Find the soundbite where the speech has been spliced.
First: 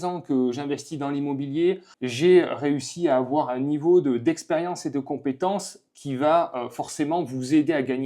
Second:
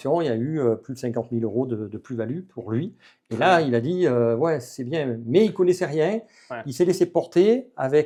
first; 1 cut; at 1.9 s

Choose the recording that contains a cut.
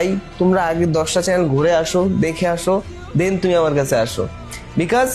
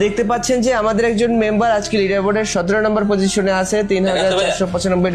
first; 1 cut; at 2.8 s

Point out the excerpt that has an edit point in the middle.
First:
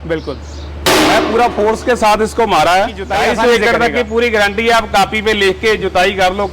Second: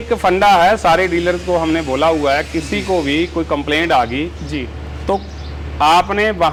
first; 1 cut; at 3.0 s

